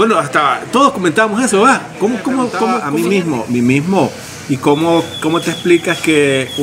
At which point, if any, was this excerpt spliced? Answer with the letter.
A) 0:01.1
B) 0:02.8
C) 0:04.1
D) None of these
B